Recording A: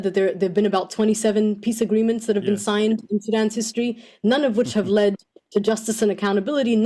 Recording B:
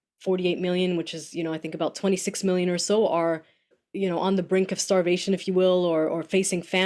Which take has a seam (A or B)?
B